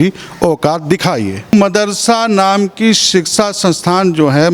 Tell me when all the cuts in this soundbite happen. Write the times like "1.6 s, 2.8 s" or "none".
1.5 s

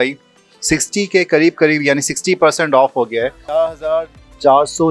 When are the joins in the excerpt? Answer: 3.5 s

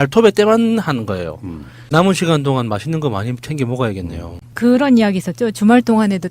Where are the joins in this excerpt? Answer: 1.8 s

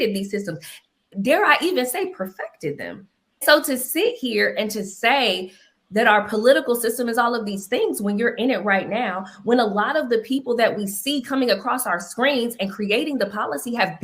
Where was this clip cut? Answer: 3.4 s

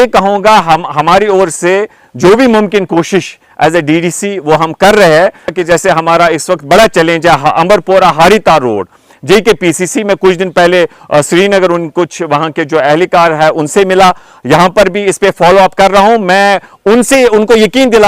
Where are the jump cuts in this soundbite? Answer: 5.5 s

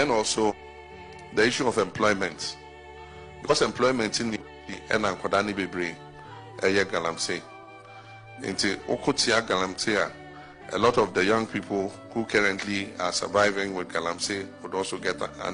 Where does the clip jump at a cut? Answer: 3.5 s

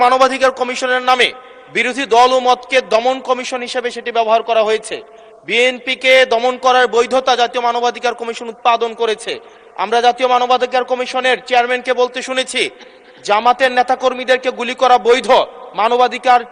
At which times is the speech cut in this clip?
none

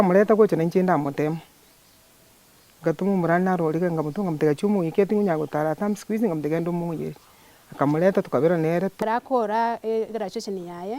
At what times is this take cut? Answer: 9.0 s

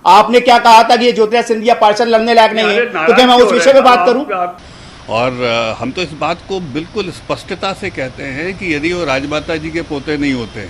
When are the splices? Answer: 4.5 s

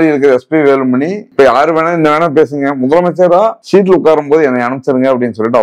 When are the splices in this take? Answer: 1.3 s, 3.6 s

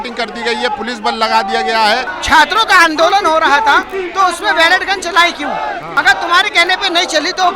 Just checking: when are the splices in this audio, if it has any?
2.1 s, 5.9 s

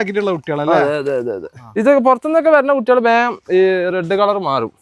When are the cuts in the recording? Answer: 1.5 s

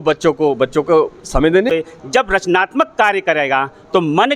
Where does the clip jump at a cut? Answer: 1.7 s

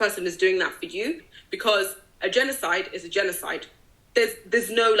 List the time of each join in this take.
1.3 s

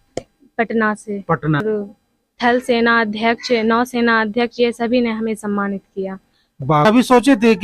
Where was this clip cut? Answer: 1.6 s, 6.8 s

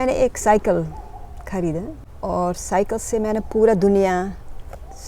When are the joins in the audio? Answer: none

